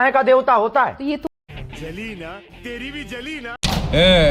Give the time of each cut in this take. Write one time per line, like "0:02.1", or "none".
0:01.2
0:03.6